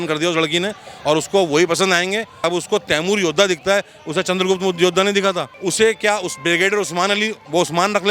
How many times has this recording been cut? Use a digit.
1